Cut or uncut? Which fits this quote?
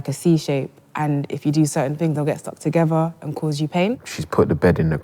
cut